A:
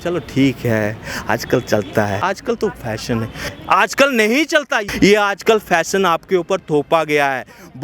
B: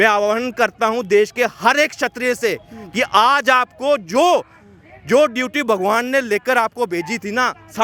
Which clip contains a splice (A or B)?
A